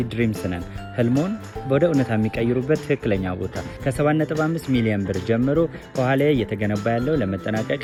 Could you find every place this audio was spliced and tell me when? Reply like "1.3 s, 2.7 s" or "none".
none